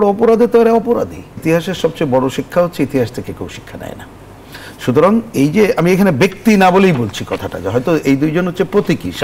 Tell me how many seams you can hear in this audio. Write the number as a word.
one